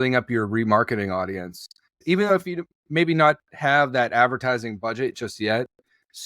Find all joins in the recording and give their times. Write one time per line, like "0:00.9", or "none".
0:02.0